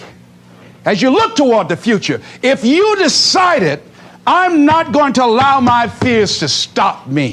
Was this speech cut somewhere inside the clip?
no; 0 cuts

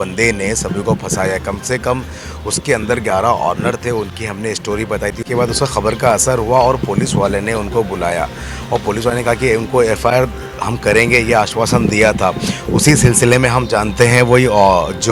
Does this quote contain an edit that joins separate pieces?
no; 0 cuts

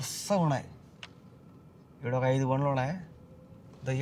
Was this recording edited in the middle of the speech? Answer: no; 0 cuts

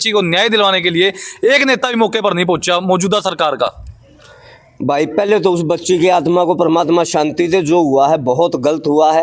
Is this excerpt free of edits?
yes; 0 cuts

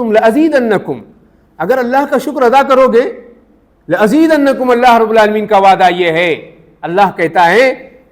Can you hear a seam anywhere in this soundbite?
no; 0 cuts

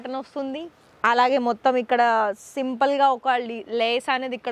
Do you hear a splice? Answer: no; 0 cuts

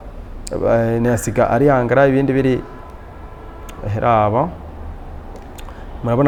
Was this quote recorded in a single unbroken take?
yes; 0 cuts

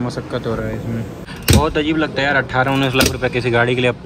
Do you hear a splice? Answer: yes; 1 cut; at 1.3 s

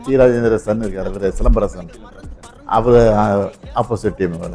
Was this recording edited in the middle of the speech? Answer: no; 0 cuts

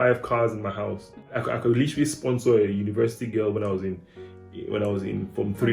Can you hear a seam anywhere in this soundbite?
yes; 1 cut; at 1.3 s

